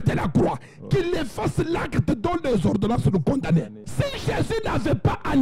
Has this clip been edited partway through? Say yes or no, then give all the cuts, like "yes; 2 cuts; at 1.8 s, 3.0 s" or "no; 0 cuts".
yes; 1 cut; at 3.8 s